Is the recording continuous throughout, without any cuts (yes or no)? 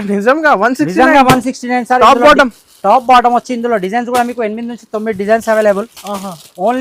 yes